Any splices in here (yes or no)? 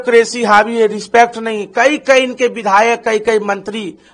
no